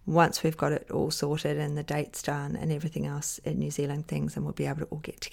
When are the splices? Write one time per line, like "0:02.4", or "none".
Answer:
0:04.1